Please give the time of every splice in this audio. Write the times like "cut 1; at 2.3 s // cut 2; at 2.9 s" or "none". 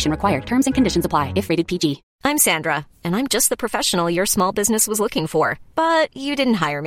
cut 1; at 2.1 s